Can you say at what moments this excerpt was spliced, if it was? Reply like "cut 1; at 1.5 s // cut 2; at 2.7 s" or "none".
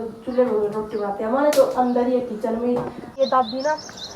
cut 1; at 3.1 s